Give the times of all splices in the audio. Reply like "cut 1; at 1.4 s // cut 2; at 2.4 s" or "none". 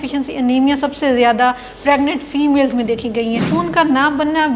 cut 1; at 3.5 s